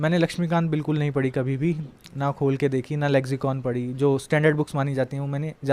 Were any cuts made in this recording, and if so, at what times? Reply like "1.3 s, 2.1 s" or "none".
none

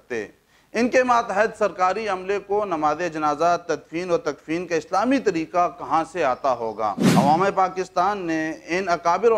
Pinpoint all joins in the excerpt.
7.0 s

